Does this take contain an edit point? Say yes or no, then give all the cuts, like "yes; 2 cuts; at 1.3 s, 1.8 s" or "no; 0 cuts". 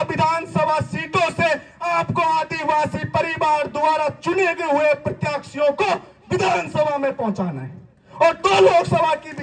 no; 0 cuts